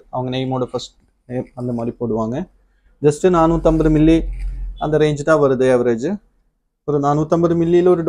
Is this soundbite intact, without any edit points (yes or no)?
yes